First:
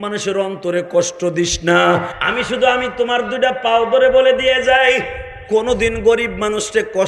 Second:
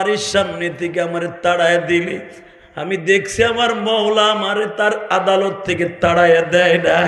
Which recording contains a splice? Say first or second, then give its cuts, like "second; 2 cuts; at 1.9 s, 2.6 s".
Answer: first; 1 cut; at 2.2 s